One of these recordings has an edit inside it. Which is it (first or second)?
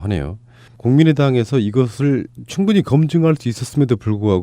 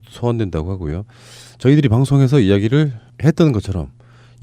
first